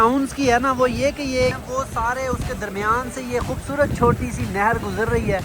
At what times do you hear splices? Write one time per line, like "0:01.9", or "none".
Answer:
0:01.6

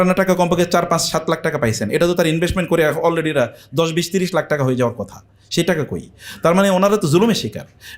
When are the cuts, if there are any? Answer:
none

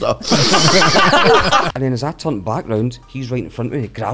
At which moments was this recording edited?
0:01.7
0:03.1

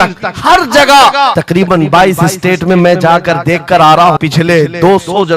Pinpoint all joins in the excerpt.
0:01.4
0:04.2

